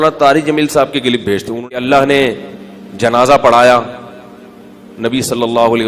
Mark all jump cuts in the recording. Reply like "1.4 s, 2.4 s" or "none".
1.6 s